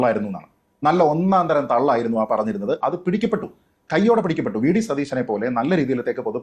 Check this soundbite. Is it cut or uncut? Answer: uncut